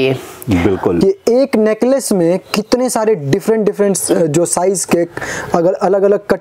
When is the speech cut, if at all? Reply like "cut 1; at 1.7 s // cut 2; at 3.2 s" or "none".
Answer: cut 1; at 1.0 s